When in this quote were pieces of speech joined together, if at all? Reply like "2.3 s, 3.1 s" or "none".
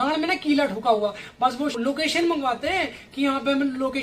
1.7 s